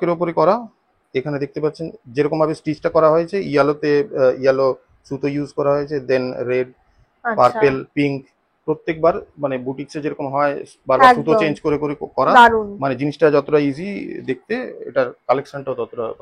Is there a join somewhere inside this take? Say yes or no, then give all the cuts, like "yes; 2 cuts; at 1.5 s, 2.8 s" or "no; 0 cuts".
no; 0 cuts